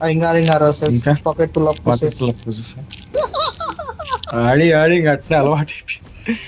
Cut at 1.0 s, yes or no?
no